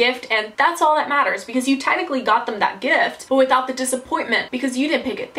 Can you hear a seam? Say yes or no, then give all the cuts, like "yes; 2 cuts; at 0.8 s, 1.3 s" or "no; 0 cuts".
no; 0 cuts